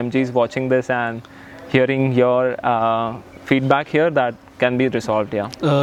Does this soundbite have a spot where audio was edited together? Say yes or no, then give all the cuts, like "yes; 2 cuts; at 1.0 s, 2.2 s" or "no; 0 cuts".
no; 0 cuts